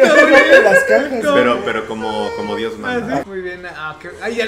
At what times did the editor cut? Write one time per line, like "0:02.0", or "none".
0:03.3